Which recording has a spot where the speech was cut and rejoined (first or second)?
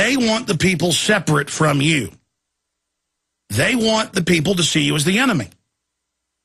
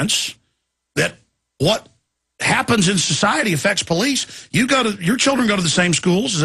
first